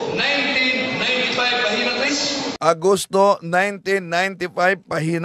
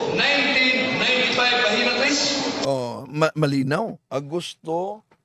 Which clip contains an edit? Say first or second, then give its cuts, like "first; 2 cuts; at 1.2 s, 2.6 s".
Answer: second; 1 cut; at 2.5 s